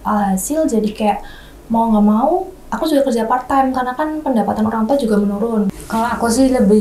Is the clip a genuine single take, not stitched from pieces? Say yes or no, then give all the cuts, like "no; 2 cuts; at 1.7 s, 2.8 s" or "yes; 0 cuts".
no; 1 cut; at 5.8 s